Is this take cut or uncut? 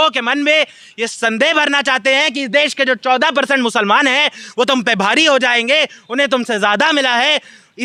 uncut